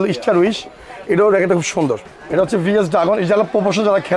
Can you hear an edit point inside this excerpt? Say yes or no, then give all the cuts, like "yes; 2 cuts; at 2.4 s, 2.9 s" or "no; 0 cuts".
yes; 1 cut; at 2.1 s